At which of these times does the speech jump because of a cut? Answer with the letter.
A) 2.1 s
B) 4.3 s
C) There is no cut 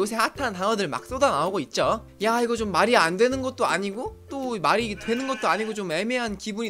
A